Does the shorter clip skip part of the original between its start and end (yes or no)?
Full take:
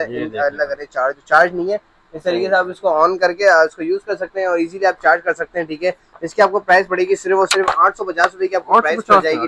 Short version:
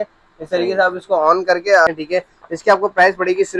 yes